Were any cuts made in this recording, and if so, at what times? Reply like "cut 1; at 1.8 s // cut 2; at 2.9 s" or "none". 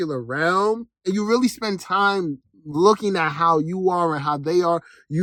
none